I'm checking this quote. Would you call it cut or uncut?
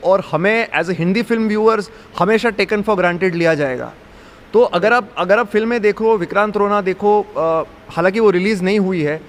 uncut